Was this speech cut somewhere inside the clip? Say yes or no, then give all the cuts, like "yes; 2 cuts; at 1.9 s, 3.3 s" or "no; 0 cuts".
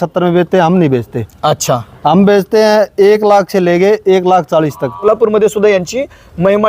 yes; 1 cut; at 4.9 s